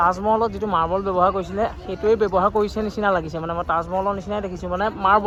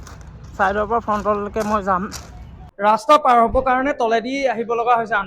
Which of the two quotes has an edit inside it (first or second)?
second